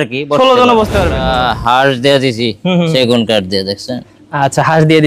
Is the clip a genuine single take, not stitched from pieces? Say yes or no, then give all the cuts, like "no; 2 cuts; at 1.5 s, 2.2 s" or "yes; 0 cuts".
no; 1 cut; at 1.2 s